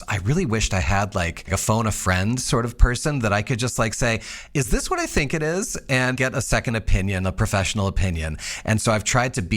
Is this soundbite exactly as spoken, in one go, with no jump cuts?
no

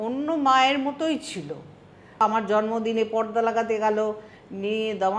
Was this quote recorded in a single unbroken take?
no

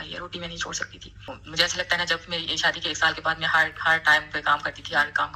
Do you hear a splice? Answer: yes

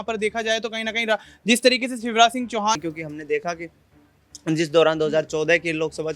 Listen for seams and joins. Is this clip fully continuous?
no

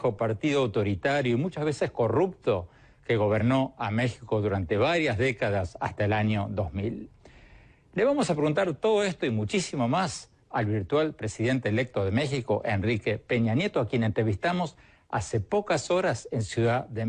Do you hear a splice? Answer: no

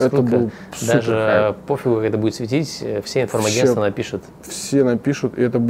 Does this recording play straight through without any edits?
yes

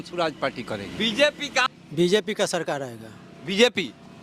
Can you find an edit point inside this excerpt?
yes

